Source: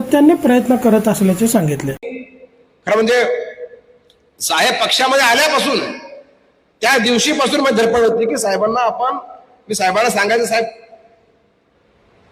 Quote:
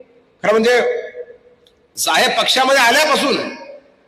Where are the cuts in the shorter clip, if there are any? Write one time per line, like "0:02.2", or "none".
none